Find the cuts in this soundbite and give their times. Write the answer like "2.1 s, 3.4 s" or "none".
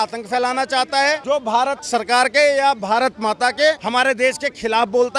1.6 s, 3.8 s